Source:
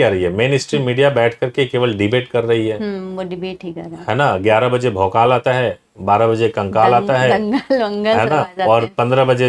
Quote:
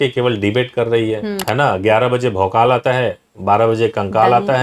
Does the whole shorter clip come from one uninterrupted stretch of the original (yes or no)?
no